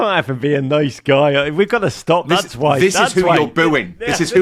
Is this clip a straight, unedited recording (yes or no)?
yes